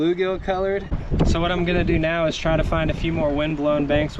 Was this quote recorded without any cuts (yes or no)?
no